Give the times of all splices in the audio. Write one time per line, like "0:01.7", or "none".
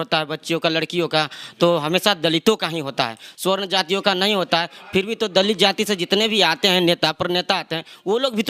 none